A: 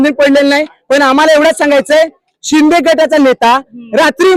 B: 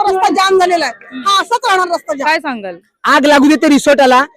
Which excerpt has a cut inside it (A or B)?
B